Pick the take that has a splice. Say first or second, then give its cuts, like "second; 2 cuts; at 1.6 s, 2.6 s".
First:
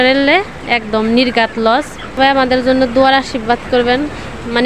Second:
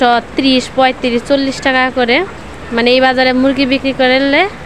first; 1 cut; at 2.2 s